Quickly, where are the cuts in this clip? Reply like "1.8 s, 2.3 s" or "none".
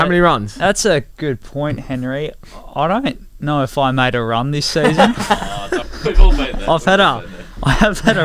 5.8 s